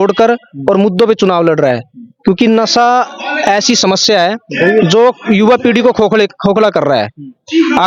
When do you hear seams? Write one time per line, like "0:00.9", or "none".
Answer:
none